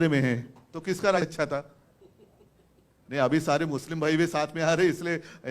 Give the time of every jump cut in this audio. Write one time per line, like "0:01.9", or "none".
0:01.2